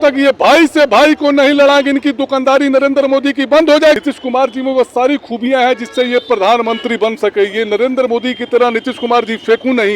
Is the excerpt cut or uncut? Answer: cut